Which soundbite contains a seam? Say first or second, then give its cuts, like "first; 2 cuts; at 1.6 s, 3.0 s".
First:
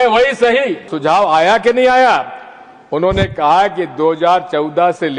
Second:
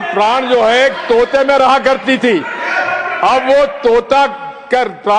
first; 1 cut; at 0.9 s